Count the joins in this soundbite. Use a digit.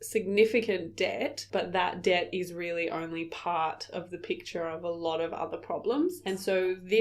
1